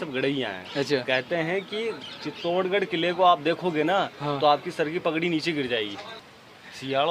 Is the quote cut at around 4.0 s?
no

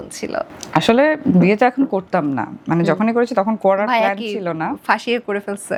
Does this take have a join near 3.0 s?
no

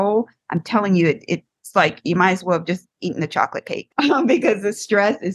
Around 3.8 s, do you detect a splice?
yes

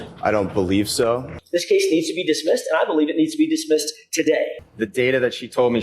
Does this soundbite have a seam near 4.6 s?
yes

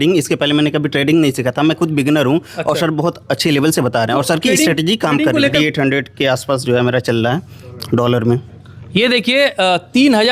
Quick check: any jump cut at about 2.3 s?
no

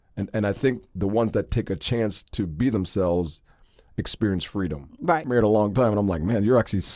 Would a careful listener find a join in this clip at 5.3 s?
yes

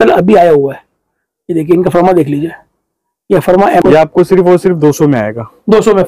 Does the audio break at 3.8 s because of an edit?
yes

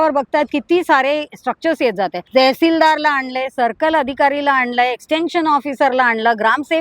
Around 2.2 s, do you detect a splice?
yes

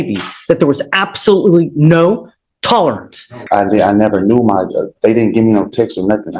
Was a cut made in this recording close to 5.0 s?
no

